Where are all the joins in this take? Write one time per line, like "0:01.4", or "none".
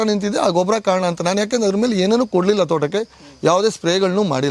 none